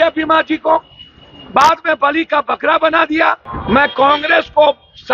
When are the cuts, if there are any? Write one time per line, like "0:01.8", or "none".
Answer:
0:03.5